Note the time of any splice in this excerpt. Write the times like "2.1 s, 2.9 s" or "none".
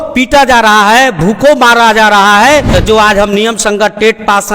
2.7 s